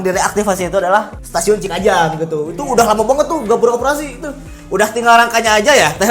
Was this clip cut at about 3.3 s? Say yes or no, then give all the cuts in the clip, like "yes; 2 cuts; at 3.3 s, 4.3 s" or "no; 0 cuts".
no; 0 cuts